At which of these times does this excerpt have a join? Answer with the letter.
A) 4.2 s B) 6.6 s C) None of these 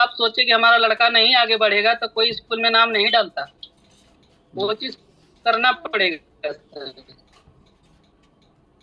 C